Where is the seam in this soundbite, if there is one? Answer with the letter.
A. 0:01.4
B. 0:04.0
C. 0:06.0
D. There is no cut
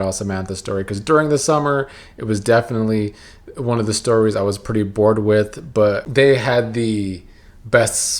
C